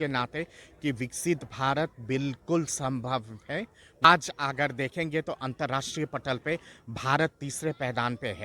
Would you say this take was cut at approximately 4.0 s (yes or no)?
yes